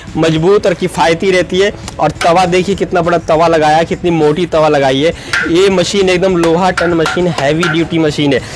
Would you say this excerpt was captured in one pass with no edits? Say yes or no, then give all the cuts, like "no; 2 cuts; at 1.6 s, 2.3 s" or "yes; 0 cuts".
yes; 0 cuts